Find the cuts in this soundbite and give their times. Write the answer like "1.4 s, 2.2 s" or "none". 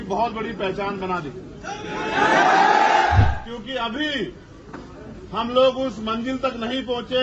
3.2 s